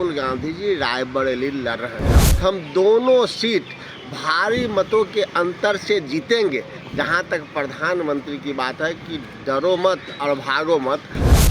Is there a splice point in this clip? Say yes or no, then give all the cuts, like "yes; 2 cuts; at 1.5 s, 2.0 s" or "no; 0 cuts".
yes; 1 cut; at 2.1 s